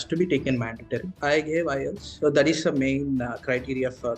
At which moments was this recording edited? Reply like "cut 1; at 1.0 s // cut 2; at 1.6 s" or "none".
cut 1; at 1.1 s